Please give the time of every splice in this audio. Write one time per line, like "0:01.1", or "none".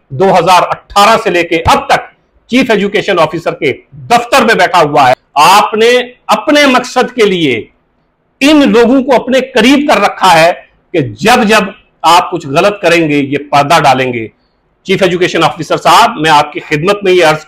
0:05.2